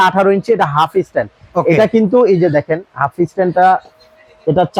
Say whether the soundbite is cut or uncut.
uncut